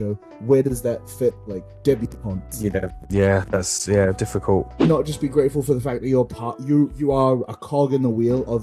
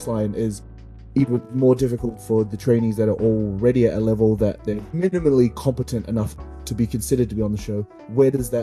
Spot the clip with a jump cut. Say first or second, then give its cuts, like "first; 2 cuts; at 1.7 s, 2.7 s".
first; 1 cut; at 4.8 s